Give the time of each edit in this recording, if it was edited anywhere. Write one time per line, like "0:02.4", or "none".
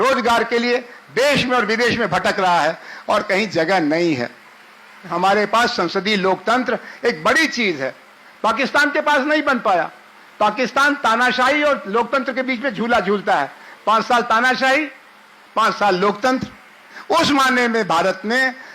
0:05.1
0:16.9